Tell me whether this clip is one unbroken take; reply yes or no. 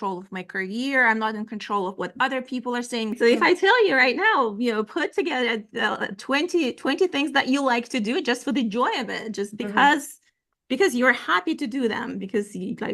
no